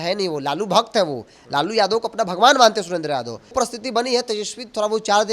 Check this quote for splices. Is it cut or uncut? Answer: cut